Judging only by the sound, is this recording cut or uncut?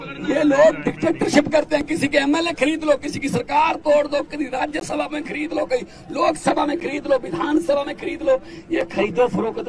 uncut